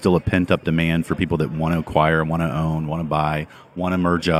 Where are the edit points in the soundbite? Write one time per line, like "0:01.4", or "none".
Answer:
none